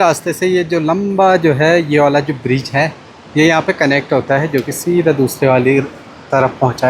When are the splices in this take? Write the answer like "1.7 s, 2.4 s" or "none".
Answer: none